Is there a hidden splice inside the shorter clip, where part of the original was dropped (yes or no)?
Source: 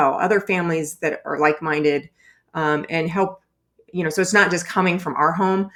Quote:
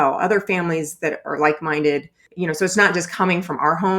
yes